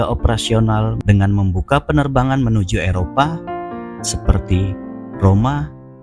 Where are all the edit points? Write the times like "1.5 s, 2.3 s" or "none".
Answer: 1.0 s